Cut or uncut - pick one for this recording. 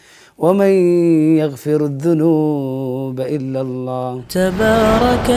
cut